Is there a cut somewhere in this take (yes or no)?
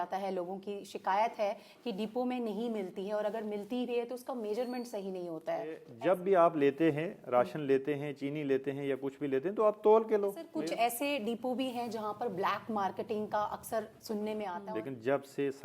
yes